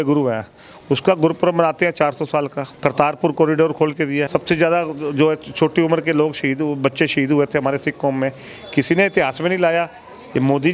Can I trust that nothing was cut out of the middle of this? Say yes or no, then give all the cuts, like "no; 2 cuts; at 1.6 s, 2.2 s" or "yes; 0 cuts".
no; 2 cuts; at 2.7 s, 4.3 s